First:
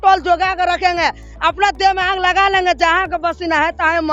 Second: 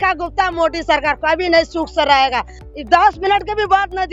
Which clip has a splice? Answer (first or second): second